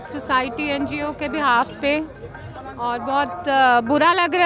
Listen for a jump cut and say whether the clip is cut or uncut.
uncut